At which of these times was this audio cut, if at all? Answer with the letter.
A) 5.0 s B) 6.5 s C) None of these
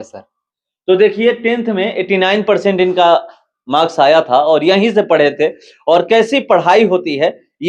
C